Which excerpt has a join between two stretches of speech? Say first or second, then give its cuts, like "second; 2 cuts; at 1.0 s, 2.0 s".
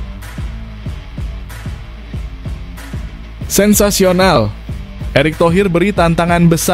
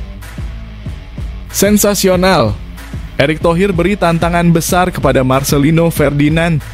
second; 1 cut; at 1.6 s